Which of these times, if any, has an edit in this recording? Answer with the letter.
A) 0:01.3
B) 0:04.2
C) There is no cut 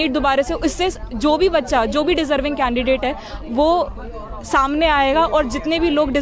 C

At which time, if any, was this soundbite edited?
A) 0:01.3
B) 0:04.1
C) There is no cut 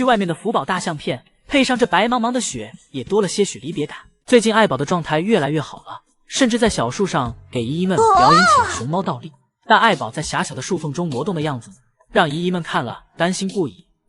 B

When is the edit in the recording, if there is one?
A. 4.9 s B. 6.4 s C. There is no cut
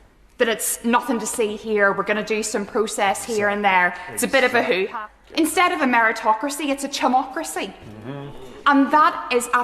A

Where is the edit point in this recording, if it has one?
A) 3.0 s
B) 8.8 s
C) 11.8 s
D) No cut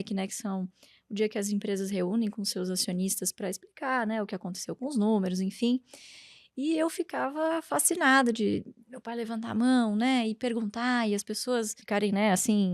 C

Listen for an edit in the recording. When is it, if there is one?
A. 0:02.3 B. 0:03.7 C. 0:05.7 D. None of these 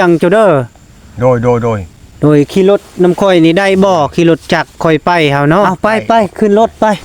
C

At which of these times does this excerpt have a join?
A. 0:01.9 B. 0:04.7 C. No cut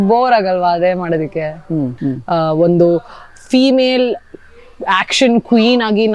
A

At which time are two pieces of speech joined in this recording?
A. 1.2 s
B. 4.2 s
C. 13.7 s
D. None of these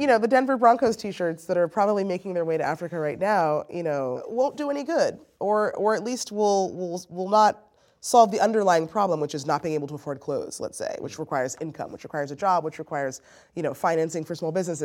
B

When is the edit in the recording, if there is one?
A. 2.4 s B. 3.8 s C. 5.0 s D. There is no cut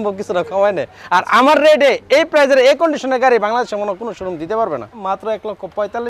C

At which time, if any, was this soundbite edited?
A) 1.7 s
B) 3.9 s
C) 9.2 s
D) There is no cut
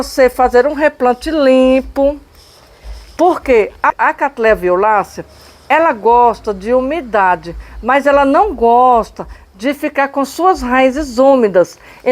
B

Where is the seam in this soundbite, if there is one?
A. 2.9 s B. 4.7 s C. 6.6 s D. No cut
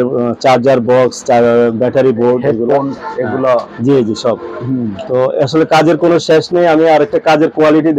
D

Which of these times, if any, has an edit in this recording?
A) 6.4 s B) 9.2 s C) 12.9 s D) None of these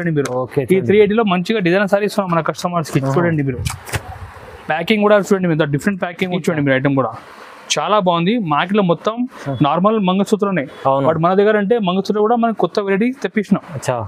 A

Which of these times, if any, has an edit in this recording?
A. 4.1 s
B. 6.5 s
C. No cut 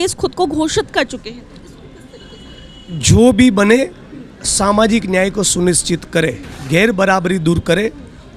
B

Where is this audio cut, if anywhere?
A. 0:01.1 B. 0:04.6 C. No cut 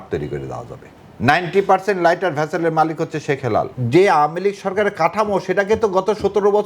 A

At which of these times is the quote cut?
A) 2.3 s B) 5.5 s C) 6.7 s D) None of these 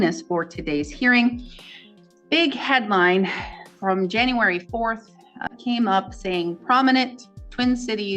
B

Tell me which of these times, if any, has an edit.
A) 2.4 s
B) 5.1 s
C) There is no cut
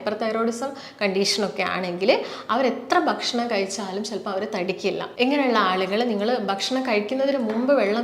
B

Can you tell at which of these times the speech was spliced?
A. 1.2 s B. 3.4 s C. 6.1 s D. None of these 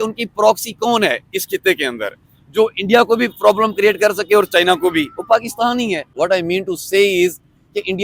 C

